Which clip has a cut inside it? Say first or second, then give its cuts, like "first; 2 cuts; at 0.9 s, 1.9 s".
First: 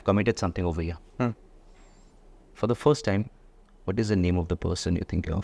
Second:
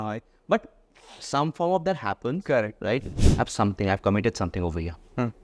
second; 1 cut; at 3.1 s